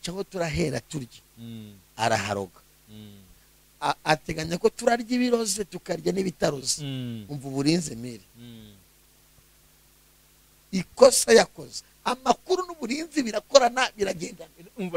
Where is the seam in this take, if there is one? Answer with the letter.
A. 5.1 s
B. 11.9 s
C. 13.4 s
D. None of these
B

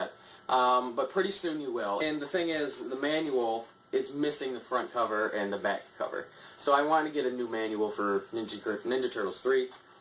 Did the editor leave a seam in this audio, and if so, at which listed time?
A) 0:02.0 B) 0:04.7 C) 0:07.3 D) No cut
D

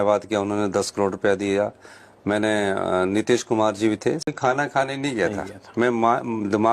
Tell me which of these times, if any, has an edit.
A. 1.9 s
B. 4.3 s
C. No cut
B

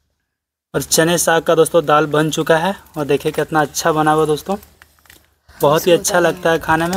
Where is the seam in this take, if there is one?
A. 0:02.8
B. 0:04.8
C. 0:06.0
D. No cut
D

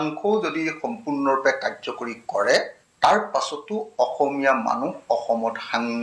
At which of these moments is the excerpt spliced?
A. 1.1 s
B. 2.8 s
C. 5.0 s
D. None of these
B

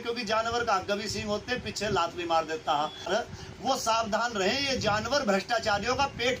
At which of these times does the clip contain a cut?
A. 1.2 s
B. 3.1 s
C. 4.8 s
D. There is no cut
B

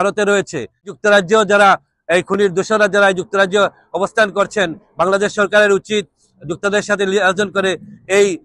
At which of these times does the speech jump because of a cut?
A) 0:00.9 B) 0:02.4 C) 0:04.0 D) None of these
A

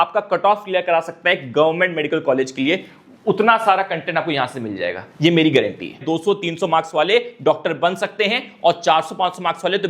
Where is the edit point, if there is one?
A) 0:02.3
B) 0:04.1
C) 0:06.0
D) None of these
C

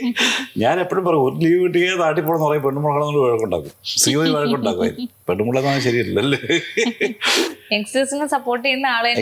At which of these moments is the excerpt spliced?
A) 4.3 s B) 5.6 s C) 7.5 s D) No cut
C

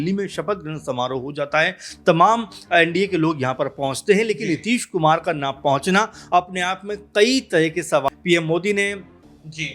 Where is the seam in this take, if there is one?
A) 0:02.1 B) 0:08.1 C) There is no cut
B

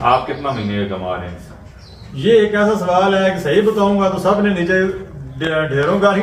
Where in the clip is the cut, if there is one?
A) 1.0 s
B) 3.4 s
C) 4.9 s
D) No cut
D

